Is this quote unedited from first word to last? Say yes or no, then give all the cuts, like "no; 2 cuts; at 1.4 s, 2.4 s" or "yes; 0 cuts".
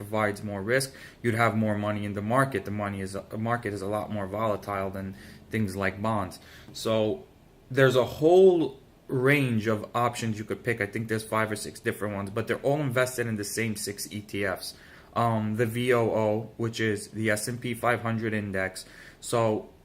no; 1 cut; at 17.6 s